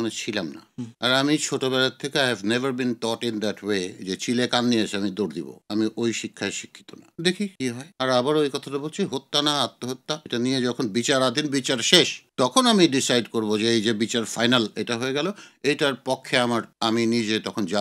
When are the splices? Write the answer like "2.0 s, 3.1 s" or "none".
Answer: 7.8 s, 10.2 s